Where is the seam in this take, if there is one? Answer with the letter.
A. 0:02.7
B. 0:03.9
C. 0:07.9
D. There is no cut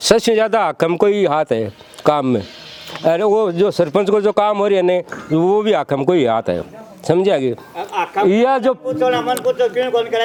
D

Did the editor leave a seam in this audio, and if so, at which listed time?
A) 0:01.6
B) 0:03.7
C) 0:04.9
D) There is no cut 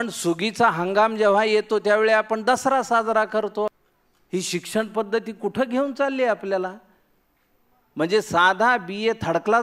B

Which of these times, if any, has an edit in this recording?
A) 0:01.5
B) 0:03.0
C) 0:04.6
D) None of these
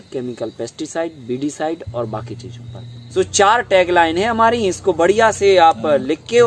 B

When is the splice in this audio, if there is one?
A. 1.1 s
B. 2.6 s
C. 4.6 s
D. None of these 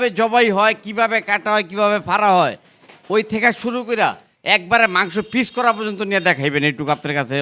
D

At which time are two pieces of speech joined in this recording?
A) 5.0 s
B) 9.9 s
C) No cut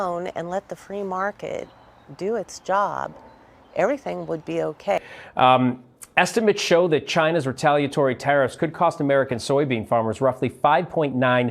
A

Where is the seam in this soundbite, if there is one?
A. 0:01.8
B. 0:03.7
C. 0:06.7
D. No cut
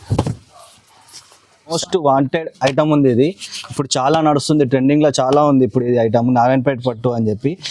A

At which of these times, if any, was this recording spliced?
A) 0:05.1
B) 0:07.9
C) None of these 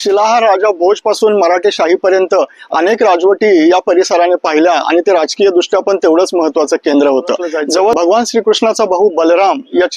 B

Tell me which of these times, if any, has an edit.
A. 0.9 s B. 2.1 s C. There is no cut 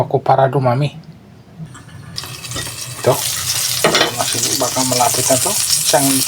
B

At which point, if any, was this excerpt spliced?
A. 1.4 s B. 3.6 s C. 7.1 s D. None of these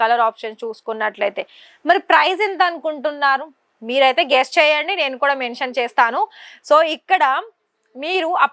D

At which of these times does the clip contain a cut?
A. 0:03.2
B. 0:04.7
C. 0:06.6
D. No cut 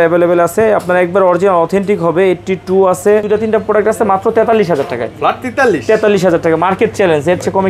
A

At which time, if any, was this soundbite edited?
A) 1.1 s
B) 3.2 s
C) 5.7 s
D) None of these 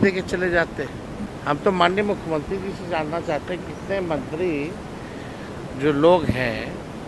A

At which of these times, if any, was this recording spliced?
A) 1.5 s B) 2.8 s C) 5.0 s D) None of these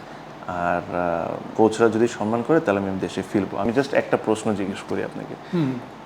A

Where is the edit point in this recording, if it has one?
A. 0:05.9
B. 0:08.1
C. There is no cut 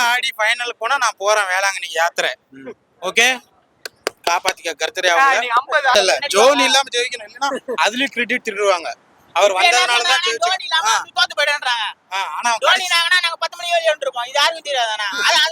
A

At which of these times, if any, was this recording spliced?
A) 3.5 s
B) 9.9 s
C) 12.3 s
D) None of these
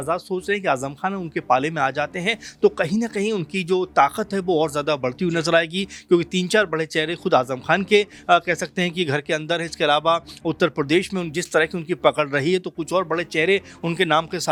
D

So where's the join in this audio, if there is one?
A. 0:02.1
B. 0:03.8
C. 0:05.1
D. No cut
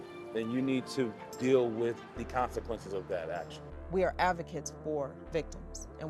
B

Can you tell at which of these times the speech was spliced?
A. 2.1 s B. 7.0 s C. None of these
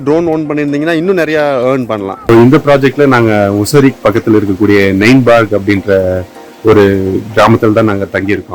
A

